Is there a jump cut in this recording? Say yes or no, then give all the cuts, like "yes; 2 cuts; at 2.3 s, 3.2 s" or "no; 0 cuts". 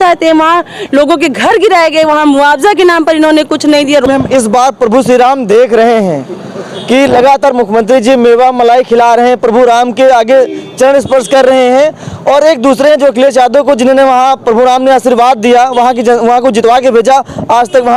yes; 1 cut; at 4.0 s